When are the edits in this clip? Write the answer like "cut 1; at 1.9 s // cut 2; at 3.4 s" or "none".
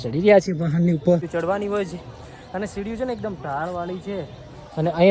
cut 1; at 1.3 s